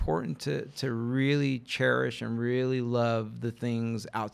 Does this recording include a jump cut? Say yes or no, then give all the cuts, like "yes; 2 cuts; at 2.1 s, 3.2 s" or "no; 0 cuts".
no; 0 cuts